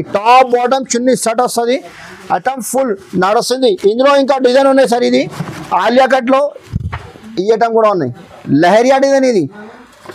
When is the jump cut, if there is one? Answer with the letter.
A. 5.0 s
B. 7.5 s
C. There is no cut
C